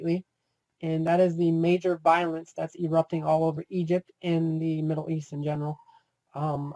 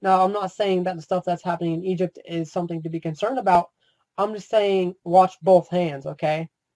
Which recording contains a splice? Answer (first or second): first